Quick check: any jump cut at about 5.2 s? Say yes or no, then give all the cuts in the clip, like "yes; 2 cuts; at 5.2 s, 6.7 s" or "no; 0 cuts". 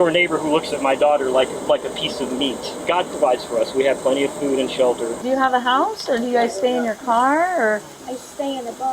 yes; 2 cuts; at 2.7 s, 5.2 s